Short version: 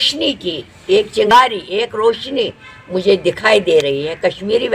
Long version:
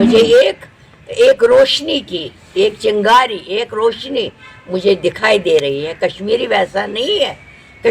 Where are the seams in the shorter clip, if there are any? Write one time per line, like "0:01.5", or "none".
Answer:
0:01.3